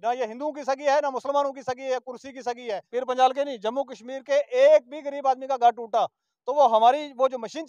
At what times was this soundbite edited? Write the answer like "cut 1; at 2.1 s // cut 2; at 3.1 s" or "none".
cut 1; at 2.8 s

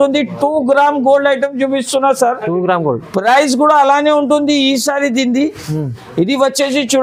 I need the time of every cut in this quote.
none

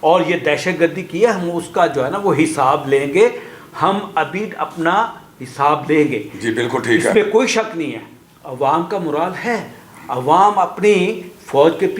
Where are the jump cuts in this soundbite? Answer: none

